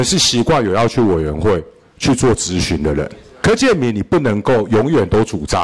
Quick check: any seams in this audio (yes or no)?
yes